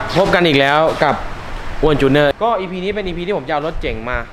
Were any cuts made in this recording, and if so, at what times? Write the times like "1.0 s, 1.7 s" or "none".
2.3 s